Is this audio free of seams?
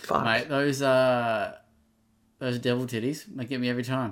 yes; 0 cuts

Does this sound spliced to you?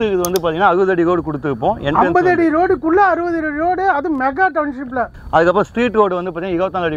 yes; 1 cut; at 5.1 s

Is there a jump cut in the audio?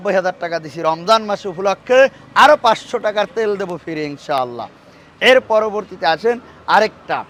no; 0 cuts

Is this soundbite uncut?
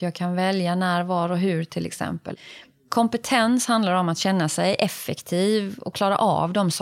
no; 2 cuts; at 2.3 s, 5.9 s

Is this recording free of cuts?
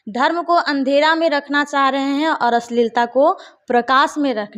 yes; 0 cuts

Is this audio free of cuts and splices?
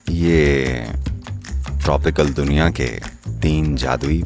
yes; 0 cuts

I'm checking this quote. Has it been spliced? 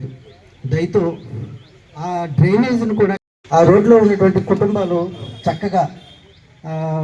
no; 0 cuts

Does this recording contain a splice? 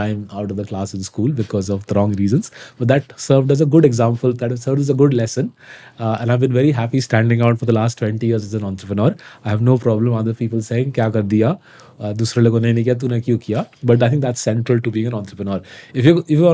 no; 0 cuts

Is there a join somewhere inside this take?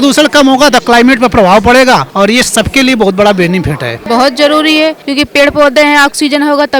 yes; 3 cuts; at 2.1 s, 3.9 s, 5.0 s

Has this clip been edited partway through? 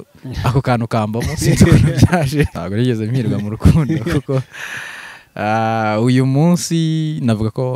yes; 1 cut; at 2.5 s

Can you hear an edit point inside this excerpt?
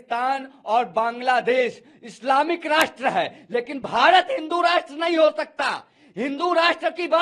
no; 0 cuts

